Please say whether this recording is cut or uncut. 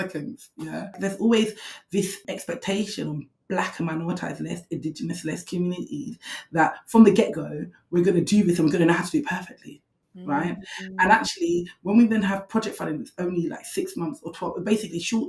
cut